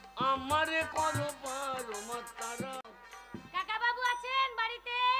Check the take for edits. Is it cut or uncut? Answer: cut